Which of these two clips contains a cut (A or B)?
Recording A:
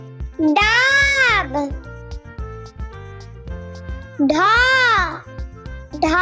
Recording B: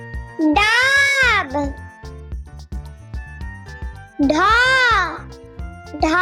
A